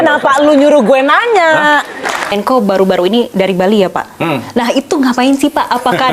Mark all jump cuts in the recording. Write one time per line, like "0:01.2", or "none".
0:02.3